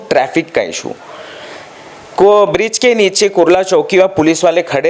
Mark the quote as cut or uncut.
uncut